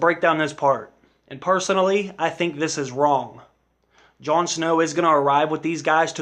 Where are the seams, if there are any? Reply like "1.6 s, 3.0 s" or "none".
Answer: none